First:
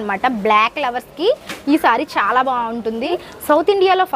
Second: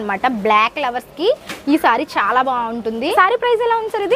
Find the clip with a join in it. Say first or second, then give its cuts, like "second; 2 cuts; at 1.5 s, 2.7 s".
first; 1 cut; at 3.1 s